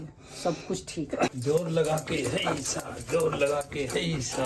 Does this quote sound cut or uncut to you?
cut